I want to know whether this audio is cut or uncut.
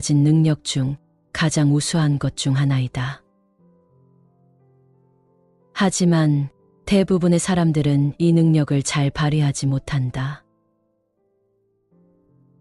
uncut